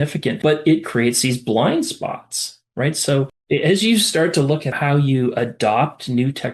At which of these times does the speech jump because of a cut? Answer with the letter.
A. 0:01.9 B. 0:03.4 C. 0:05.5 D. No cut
B